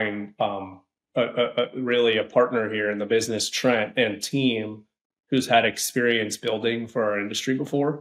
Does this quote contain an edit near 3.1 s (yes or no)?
no